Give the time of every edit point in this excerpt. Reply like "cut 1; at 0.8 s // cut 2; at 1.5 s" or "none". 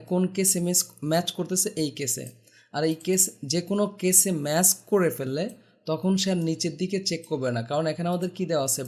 none